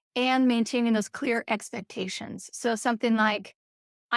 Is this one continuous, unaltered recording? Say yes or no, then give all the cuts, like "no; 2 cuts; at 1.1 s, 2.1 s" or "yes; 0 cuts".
yes; 0 cuts